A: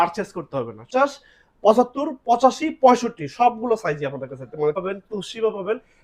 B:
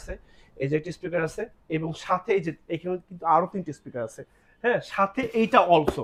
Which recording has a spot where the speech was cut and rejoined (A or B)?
A